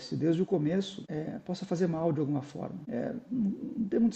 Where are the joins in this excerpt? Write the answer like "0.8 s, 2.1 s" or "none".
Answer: 1.0 s, 2.8 s